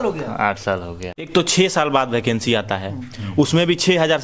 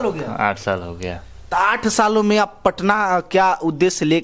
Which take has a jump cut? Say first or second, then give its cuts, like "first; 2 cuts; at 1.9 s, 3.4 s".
first; 1 cut; at 1.3 s